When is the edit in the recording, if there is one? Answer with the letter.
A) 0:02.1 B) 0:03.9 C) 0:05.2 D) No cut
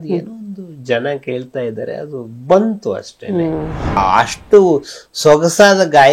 B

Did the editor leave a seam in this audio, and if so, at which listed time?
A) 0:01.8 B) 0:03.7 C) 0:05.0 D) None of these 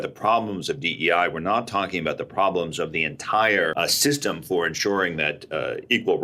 B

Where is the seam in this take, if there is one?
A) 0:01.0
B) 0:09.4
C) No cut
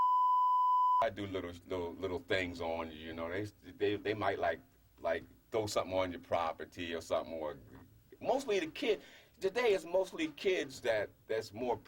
A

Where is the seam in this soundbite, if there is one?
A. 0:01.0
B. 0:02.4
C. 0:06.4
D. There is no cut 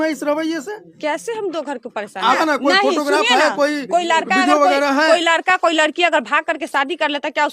B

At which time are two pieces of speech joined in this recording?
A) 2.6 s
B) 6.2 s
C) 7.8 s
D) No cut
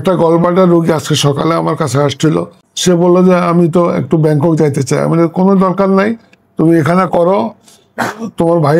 A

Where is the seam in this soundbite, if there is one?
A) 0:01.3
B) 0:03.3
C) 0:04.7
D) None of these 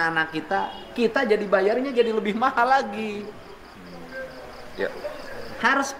D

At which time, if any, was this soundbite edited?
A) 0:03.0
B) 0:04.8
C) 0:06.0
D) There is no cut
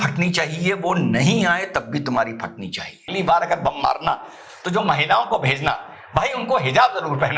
A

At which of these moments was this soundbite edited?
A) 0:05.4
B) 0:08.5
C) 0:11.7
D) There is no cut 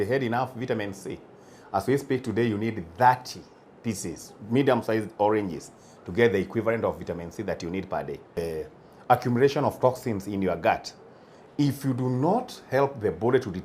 B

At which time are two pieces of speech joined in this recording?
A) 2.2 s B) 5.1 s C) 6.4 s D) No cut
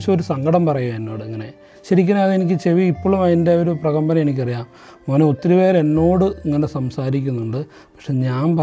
D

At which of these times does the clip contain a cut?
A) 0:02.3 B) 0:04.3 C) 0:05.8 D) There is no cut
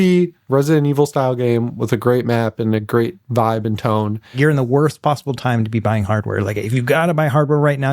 B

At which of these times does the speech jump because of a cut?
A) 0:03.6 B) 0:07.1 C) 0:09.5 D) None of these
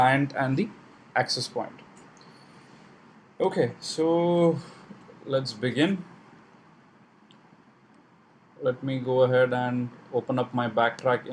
C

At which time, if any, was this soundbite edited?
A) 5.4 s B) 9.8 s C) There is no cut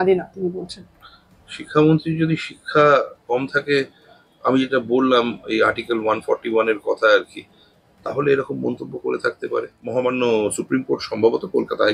B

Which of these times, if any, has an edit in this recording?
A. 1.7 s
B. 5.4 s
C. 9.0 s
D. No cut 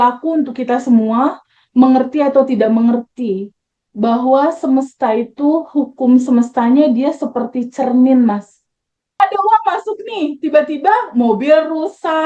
C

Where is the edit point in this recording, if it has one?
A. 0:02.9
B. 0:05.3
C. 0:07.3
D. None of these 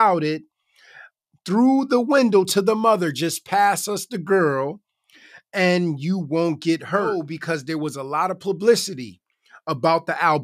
C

